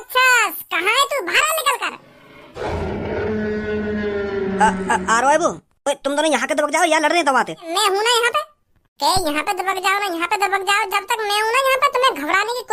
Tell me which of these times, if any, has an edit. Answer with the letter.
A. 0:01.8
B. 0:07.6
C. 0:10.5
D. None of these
B